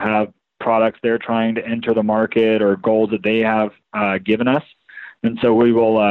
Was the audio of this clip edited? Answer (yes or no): no